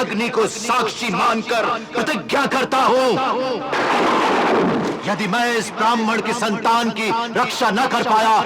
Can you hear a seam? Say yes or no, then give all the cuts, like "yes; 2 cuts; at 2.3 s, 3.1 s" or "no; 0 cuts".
no; 0 cuts